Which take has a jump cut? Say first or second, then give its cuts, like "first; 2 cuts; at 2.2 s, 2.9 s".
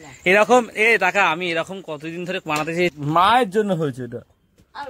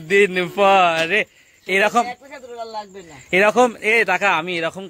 first; 1 cut; at 2.9 s